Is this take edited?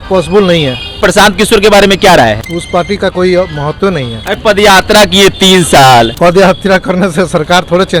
yes; 4 cuts; at 1.0 s, 2.5 s, 4.1 s, 6.1 s

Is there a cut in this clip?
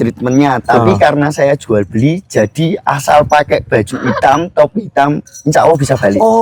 no; 0 cuts

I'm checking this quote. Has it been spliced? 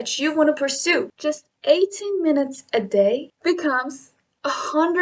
yes; 2 cuts; at 1.1 s, 3.3 s

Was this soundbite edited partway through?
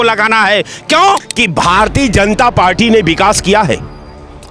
yes; 1 cut; at 1.3 s

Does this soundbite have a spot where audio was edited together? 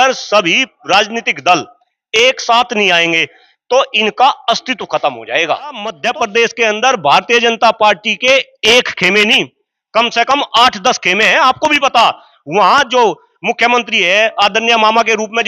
yes; 1 cut; at 6.0 s

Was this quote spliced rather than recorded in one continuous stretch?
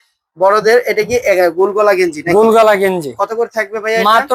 no; 0 cuts

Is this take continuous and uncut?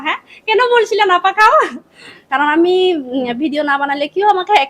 no; 1 cut; at 2.3 s

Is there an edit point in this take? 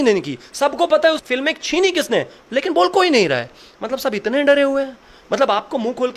no; 0 cuts

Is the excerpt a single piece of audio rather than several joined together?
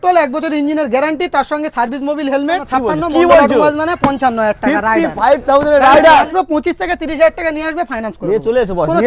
no; 2 cuts; at 2.6 s, 6.3 s

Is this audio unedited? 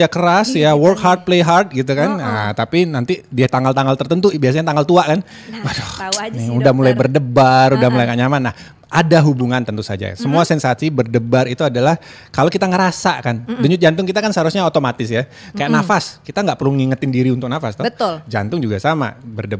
yes; 0 cuts

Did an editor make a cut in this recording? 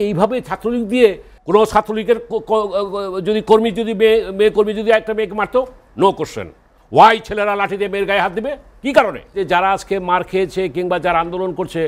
yes; 2 cuts; at 1.3 s, 9.4 s

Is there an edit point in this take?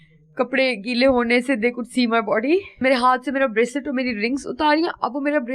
yes; 1 cut; at 2.8 s

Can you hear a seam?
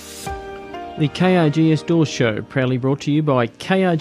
yes; 1 cut; at 1.0 s

